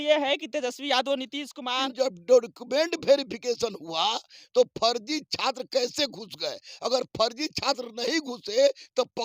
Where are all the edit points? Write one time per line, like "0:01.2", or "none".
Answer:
0:01.9